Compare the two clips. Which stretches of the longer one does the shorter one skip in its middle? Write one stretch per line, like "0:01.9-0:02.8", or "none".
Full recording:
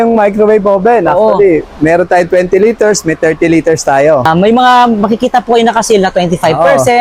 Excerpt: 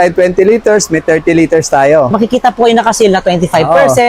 0:04.2-0:05.0